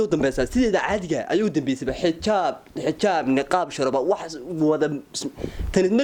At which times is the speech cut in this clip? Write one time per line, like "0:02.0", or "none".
none

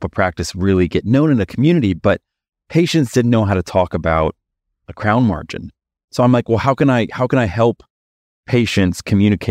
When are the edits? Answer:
none

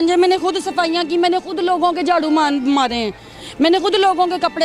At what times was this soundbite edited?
none

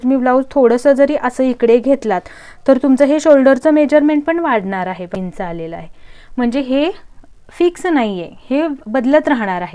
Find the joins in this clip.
0:05.1

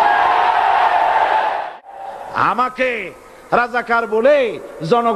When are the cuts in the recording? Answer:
0:01.7

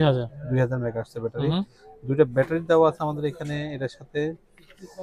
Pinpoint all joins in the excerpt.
none

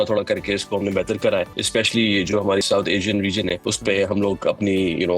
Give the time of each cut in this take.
0:01.6
0:02.6
0:03.7

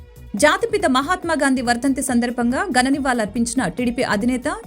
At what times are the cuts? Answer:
none

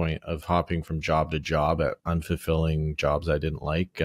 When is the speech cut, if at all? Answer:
none

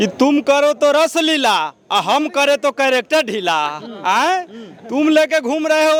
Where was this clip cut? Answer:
none

